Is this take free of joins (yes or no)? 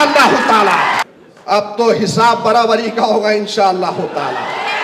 no